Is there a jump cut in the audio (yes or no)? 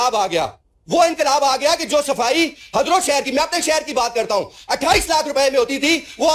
no